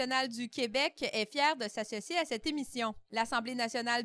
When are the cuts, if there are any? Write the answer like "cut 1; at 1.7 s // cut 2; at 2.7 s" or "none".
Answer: none